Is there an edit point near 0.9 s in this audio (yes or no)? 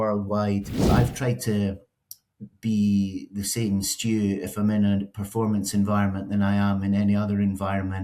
yes